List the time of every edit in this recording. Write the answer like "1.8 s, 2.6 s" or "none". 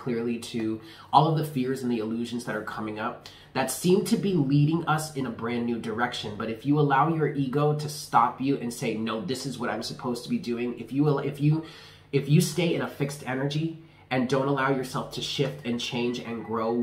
none